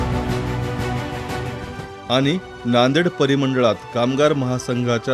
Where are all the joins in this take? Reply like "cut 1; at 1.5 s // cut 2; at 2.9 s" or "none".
cut 1; at 1.8 s